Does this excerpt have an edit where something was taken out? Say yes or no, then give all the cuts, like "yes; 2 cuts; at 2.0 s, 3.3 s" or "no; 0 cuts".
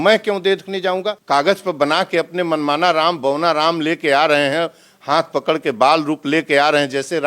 yes; 1 cut; at 1.2 s